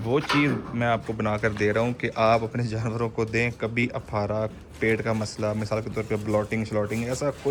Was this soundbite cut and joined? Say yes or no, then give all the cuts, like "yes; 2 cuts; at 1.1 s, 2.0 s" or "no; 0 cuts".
no; 0 cuts